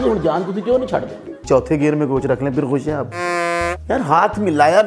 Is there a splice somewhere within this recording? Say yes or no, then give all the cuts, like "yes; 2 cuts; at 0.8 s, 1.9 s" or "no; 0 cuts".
yes; 2 cuts; at 1.4 s, 3.4 s